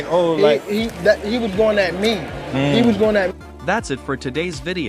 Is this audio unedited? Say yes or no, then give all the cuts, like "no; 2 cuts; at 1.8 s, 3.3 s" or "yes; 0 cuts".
no; 1 cut; at 3.3 s